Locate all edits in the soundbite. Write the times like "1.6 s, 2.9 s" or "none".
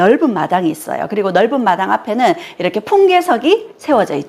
none

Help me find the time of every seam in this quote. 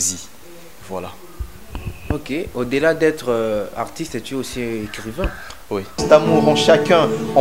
6.0 s

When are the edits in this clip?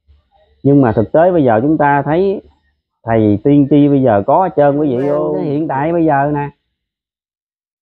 5.4 s

